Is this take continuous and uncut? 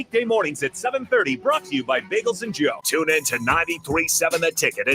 no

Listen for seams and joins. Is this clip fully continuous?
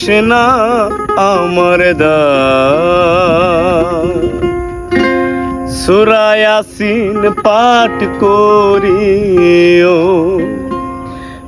yes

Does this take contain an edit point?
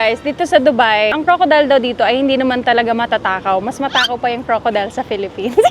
yes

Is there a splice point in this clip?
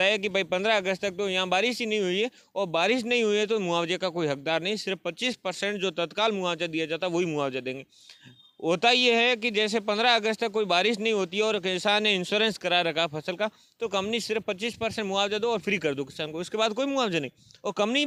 no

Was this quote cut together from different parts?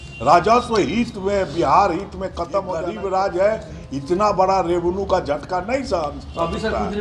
yes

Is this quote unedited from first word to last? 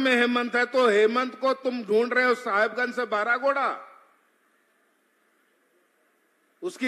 yes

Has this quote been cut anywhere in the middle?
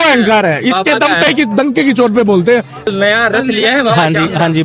yes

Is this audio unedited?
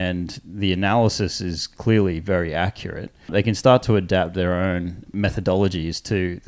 no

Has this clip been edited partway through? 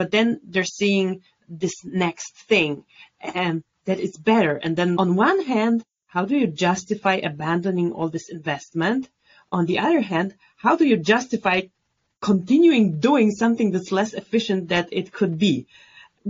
no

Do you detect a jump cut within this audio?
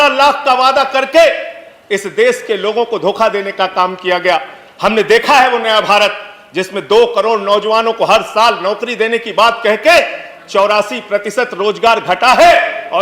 no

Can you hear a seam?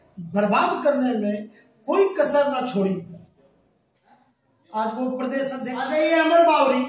yes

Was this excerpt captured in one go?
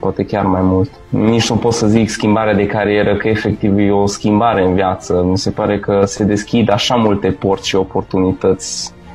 no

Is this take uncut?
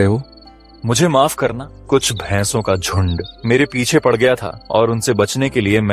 no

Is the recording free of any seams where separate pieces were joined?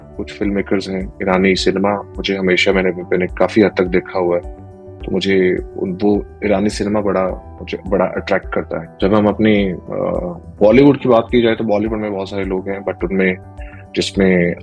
yes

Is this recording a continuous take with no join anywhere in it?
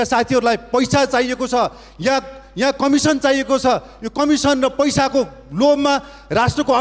yes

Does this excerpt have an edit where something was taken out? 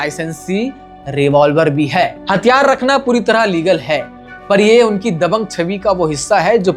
yes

